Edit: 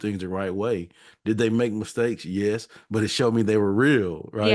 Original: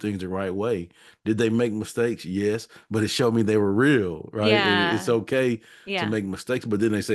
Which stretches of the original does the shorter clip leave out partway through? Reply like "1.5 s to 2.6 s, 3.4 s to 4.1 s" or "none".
none